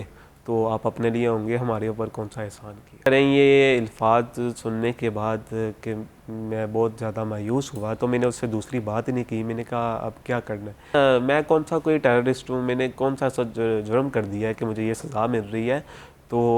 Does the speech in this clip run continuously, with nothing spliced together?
no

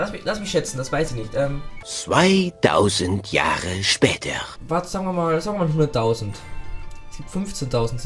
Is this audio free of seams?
no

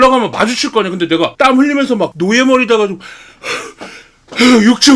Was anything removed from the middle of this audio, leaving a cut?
yes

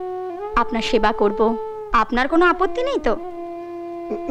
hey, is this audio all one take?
yes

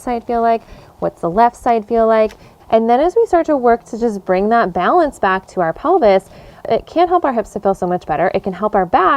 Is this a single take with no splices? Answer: no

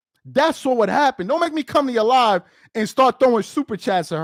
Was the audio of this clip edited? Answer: no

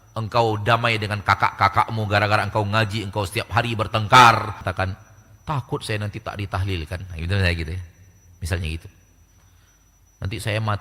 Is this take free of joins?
no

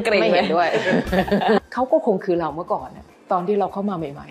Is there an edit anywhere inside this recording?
yes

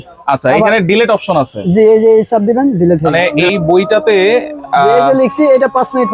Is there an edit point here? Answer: yes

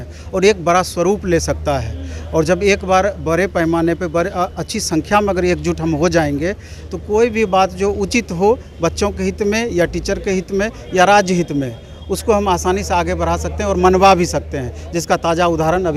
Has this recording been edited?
no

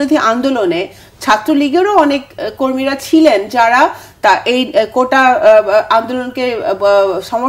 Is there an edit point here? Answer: no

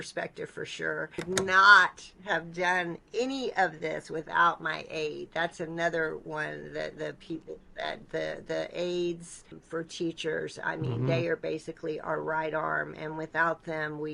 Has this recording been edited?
yes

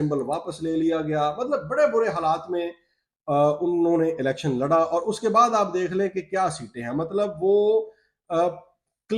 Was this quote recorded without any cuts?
yes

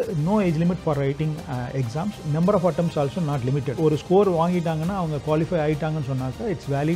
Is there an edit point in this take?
yes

